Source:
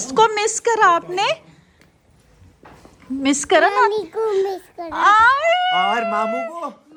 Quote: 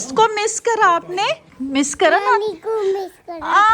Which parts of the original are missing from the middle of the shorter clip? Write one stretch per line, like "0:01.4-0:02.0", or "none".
0:01.5-0:03.0